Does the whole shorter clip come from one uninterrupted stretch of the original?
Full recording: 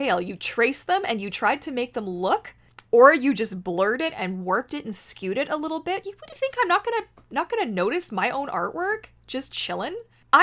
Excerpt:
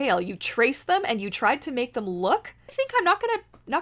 no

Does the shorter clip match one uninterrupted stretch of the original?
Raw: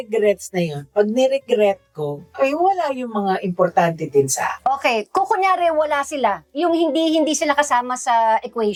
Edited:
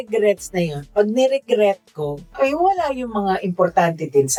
yes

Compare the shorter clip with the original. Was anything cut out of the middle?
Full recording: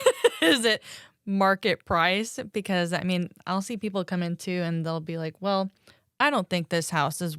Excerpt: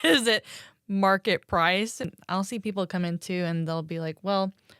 yes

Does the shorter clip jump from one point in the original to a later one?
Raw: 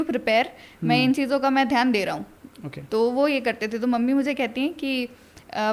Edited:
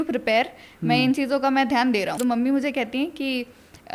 yes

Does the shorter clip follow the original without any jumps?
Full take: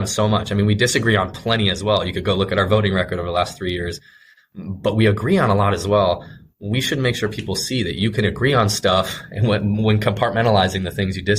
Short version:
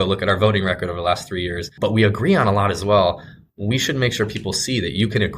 no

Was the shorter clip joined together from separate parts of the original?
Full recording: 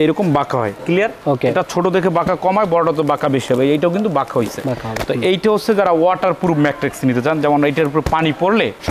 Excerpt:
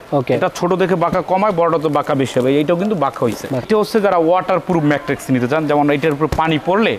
yes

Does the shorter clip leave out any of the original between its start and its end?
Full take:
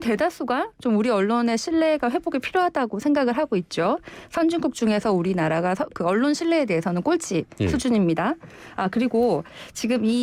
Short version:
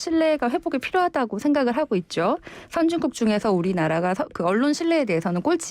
no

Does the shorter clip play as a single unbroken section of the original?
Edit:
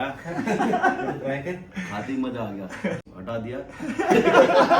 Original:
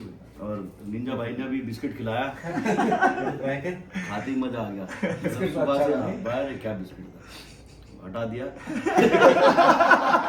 no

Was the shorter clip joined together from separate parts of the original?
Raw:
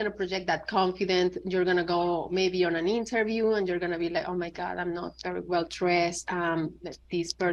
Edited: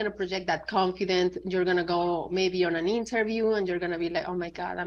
no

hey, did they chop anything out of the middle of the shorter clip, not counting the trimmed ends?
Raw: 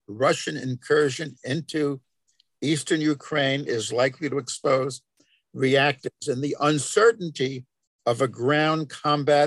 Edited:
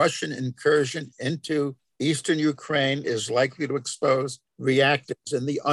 yes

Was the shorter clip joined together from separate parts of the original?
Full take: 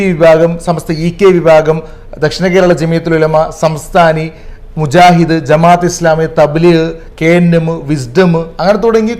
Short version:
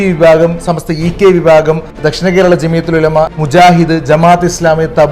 yes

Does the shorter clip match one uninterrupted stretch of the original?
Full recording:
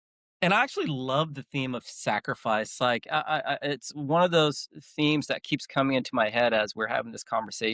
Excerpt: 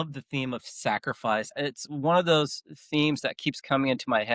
no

